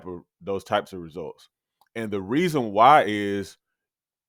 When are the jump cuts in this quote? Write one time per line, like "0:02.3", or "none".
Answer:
none